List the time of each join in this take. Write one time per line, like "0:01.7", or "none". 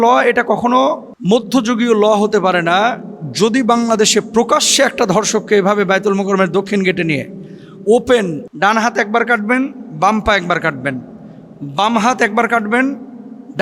0:01.1